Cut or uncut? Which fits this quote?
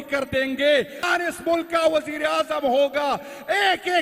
cut